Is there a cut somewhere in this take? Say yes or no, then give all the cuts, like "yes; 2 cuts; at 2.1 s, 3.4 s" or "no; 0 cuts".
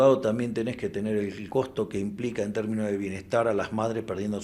yes; 1 cut; at 1.4 s